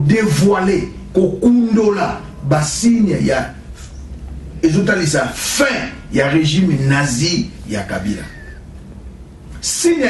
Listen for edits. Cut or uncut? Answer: uncut